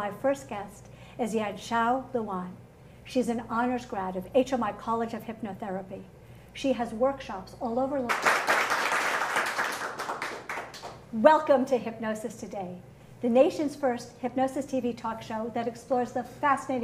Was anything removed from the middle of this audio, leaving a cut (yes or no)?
no